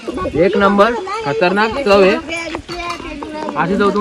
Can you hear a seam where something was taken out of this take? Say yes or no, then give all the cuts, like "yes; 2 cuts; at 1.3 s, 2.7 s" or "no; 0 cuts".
no; 0 cuts